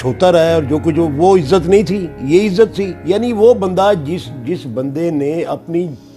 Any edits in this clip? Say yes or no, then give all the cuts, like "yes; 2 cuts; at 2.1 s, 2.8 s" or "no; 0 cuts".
yes; 1 cut; at 2.9 s